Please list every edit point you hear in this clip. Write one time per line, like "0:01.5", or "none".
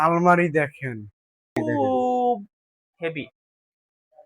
0:01.6